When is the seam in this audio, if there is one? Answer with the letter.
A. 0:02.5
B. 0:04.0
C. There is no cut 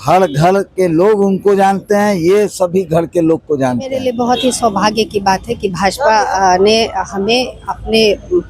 B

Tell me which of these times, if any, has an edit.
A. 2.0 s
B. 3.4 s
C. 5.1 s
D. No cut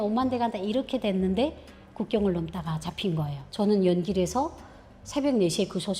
D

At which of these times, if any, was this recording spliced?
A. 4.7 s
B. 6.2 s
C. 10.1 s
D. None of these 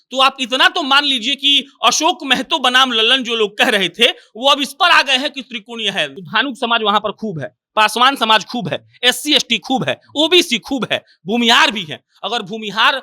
B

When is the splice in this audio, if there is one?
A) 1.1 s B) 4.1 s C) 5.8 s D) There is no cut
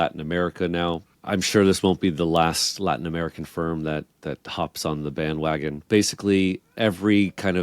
C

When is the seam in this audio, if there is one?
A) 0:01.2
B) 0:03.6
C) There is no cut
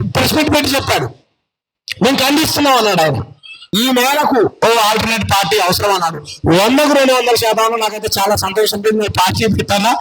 B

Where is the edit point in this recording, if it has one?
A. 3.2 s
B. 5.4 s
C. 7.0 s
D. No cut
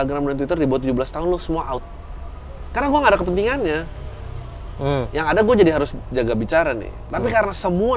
C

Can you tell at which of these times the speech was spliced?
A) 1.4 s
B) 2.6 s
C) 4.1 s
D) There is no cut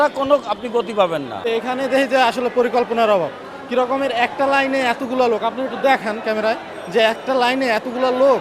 A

